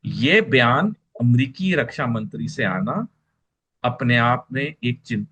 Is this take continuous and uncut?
yes; 0 cuts

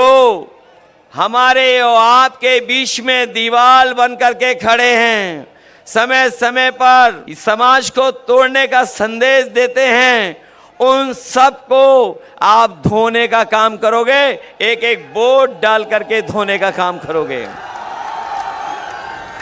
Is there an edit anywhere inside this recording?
yes; 1 cut; at 7.3 s

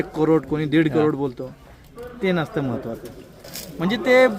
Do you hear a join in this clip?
yes; 1 cut; at 3.4 s

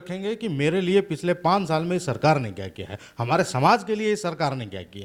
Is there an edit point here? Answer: no; 0 cuts

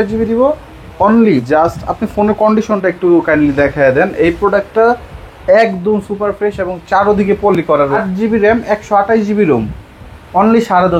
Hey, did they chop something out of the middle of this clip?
yes; 2 cuts; at 1.4 s, 8.0 s

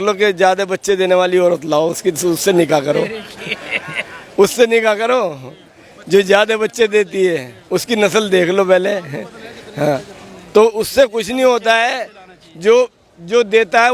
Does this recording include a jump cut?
no; 0 cuts

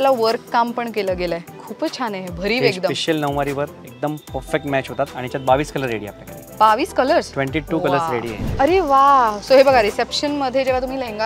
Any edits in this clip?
yes; 1 cut; at 8.4 s

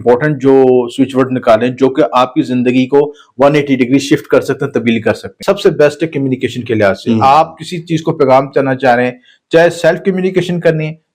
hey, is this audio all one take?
no; 1 cut; at 5.3 s

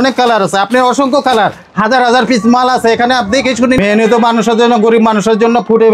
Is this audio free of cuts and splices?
yes; 0 cuts

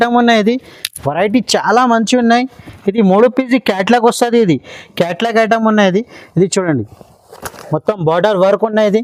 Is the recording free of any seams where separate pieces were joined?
yes; 0 cuts

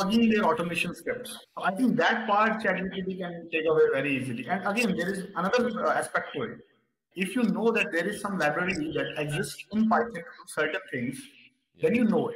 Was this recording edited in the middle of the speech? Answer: no; 0 cuts

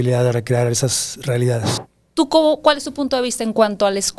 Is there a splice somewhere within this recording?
yes; 1 cut; at 1.8 s

